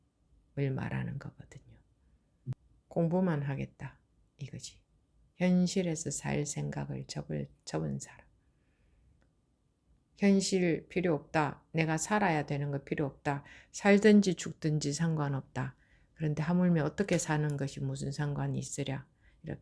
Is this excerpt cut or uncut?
cut